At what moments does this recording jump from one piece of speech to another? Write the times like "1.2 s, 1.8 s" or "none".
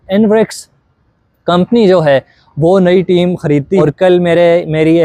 3.8 s